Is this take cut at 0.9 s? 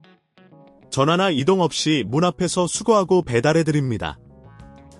yes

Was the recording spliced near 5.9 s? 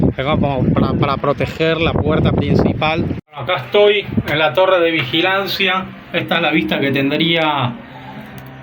no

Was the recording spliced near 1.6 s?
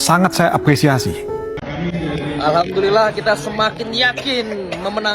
yes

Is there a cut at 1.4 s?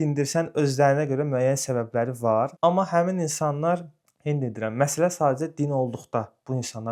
no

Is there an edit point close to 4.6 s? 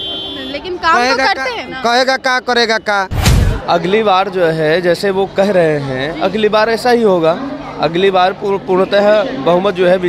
no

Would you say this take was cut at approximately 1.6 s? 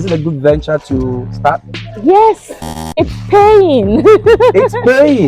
no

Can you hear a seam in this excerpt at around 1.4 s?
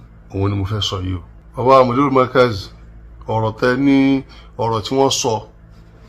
yes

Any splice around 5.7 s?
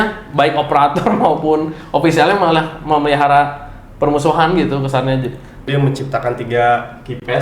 yes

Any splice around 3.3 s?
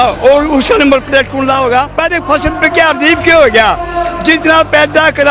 no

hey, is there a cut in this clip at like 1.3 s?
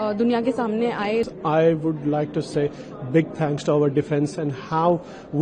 yes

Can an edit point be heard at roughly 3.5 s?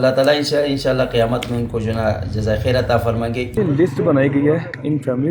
yes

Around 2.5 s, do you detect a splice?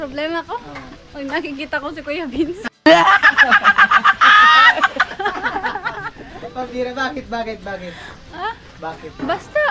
no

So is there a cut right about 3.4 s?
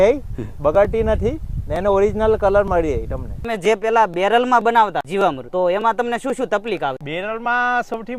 yes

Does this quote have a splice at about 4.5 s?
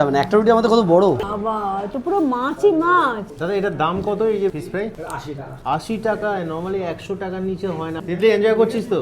no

